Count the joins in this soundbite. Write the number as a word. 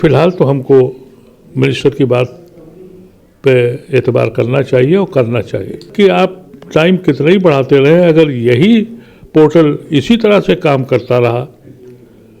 one